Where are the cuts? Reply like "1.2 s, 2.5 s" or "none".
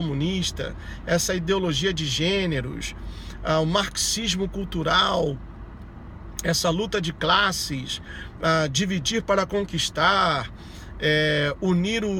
7.9 s